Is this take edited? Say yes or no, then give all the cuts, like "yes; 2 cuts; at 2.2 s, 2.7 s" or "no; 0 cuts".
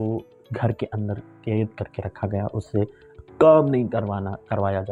no; 0 cuts